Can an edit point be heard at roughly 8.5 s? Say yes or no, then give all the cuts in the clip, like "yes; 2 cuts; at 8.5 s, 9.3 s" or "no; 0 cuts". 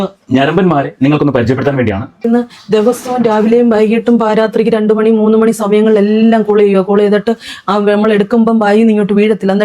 no; 1 cut; at 2.3 s